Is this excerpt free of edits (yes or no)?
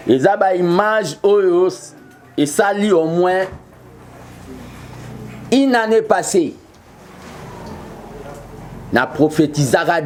yes